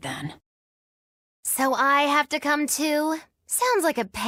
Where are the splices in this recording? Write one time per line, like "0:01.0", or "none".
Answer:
none